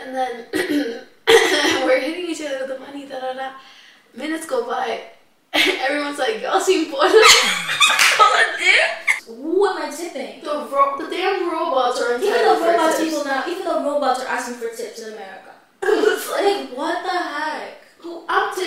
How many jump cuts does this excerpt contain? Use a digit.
1